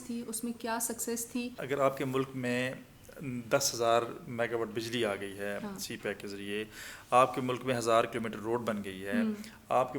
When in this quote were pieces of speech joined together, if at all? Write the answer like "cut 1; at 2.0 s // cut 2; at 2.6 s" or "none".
cut 1; at 1.6 s